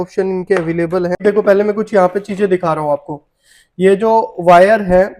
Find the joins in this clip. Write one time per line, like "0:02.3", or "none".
0:01.2